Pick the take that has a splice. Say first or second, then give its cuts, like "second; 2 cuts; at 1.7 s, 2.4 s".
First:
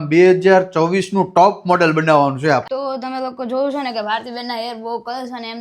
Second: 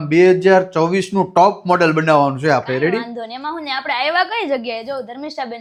first; 1 cut; at 2.6 s